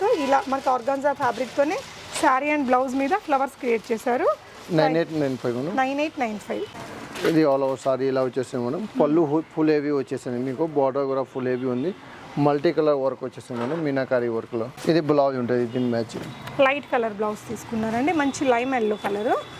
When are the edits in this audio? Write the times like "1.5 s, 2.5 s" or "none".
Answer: none